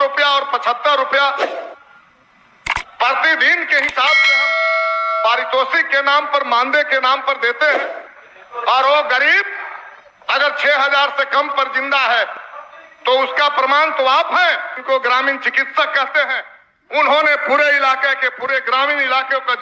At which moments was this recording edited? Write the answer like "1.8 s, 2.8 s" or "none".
14.8 s